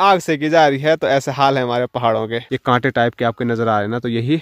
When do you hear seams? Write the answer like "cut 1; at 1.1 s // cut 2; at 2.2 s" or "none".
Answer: cut 1; at 2.4 s